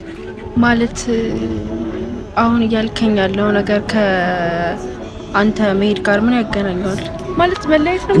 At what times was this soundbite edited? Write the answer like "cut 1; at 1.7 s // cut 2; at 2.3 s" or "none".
cut 1; at 7.2 s